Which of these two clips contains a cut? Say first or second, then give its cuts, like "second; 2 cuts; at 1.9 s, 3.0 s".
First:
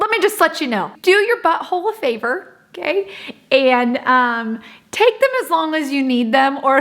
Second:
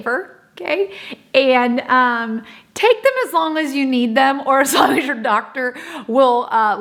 first; 1 cut; at 0.9 s